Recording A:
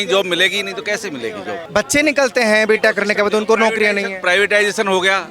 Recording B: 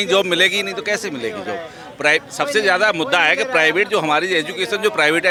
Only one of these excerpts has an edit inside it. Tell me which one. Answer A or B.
A